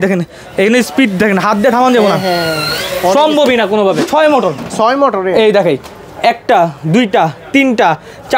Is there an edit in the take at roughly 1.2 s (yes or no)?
no